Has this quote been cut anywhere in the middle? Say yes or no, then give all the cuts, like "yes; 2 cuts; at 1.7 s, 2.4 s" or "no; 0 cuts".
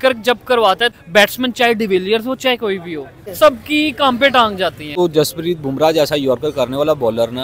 yes; 3 cuts; at 1.0 s, 3.2 s, 4.8 s